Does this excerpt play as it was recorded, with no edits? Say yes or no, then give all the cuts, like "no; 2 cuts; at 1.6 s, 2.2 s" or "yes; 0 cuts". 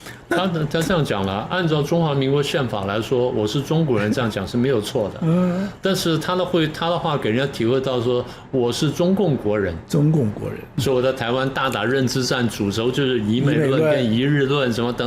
no; 1 cut; at 10.8 s